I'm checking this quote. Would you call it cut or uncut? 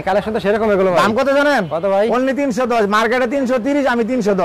uncut